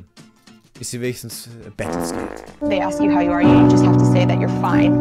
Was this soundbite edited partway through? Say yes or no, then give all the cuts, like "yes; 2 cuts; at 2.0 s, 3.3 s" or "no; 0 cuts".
no; 0 cuts